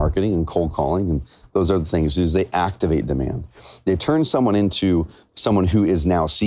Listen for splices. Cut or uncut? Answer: uncut